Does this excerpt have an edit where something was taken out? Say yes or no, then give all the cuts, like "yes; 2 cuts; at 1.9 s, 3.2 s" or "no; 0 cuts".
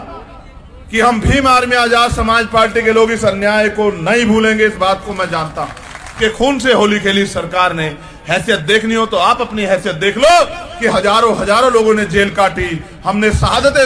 yes; 1 cut; at 6.2 s